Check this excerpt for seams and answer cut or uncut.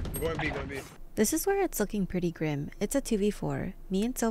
uncut